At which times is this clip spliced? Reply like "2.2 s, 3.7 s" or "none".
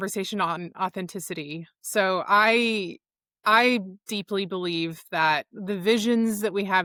none